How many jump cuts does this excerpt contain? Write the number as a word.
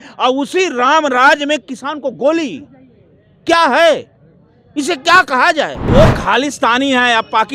one